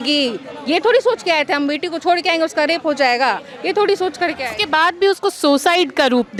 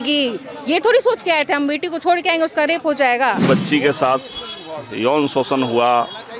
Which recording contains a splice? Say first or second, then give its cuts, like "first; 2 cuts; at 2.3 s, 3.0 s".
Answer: second; 1 cut; at 3.4 s